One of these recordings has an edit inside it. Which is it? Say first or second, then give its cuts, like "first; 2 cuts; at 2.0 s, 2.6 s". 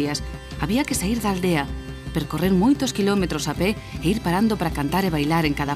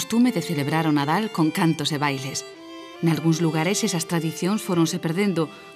second; 1 cut; at 1.0 s